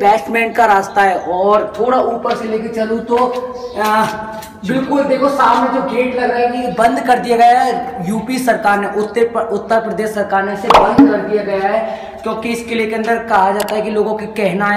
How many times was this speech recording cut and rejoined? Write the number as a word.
zero